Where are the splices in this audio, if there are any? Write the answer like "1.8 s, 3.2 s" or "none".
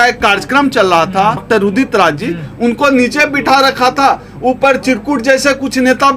1.4 s